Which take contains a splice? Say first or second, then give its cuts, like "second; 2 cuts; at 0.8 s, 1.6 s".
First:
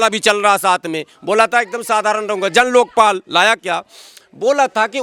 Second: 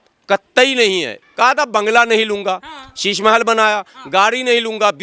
second; 1 cut; at 1.2 s